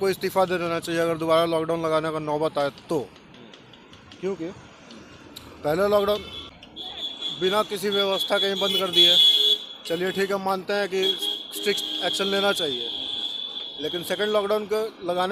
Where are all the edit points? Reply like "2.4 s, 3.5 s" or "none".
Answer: none

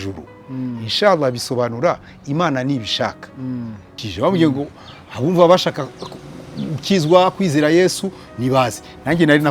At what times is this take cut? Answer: 4.0 s

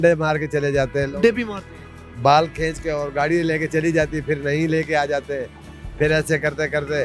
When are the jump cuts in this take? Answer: none

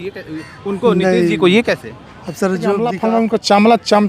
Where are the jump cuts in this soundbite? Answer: 2.9 s

